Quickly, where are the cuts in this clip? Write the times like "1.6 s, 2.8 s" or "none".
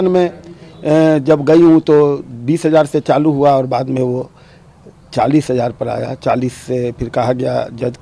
none